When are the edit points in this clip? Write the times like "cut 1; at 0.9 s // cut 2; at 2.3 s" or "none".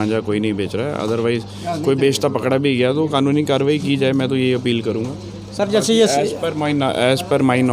none